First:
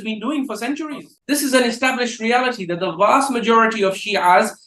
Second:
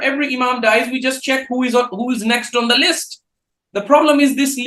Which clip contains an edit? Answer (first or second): first